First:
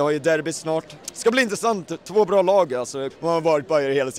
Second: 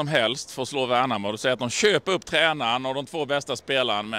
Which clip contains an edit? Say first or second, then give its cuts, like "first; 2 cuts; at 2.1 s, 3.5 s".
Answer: first; 2 cuts; at 1.0 s, 3.0 s